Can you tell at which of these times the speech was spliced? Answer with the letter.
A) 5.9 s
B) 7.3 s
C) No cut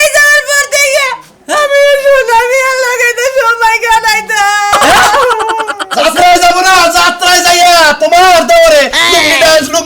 A